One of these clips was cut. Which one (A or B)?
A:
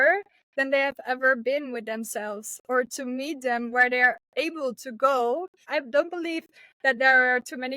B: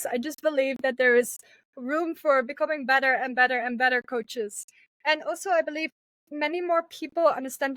A